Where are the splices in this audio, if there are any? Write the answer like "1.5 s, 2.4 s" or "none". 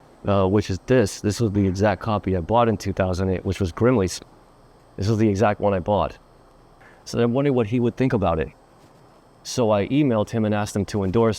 6.8 s

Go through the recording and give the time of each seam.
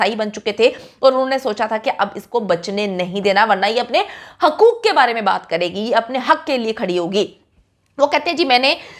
none

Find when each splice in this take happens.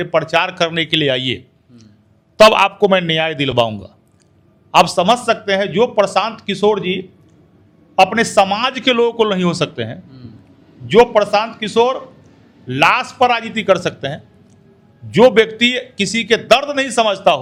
none

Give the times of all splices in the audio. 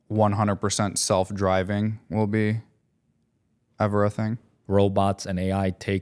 4.5 s

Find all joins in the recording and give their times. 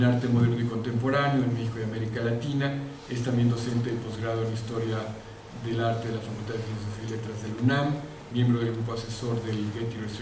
3.6 s

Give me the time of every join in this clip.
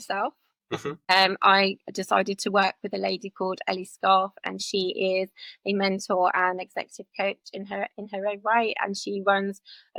none

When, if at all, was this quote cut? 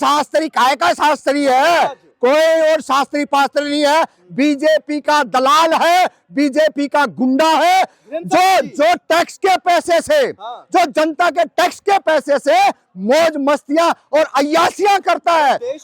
none

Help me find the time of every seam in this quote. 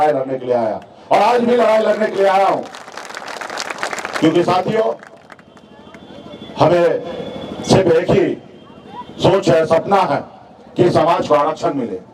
none

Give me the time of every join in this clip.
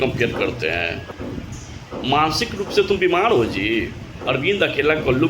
1.0 s

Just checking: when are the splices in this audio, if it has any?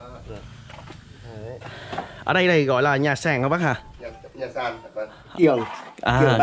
5.3 s

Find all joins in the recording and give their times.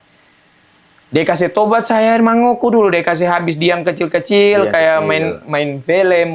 none

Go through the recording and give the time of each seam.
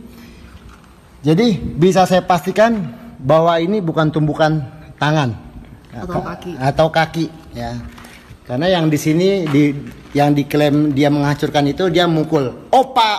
none

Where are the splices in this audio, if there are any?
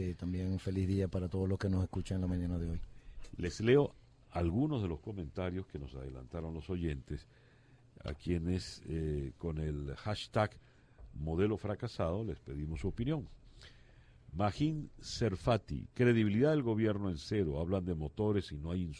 4.6 s

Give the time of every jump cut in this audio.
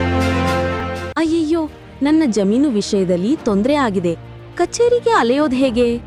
none

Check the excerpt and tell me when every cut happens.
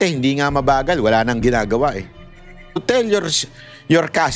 2.8 s

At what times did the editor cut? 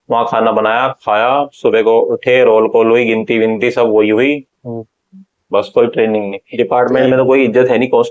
6.4 s

